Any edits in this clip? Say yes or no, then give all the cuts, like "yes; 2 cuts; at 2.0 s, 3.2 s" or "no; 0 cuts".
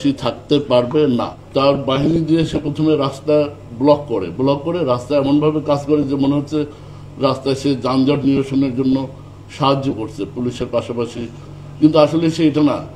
yes; 1 cut; at 1.4 s